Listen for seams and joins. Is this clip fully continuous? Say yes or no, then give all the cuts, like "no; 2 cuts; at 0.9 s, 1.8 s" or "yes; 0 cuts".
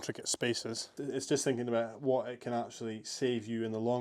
no; 1 cut; at 0.9 s